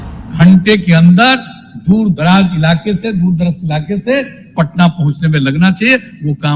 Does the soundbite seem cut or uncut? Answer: uncut